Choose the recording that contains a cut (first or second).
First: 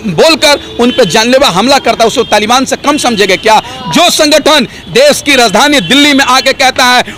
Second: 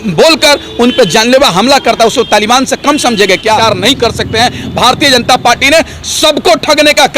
second